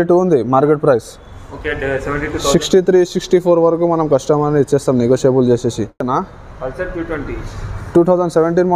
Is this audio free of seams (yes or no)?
no